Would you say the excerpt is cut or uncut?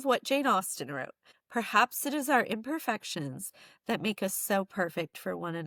uncut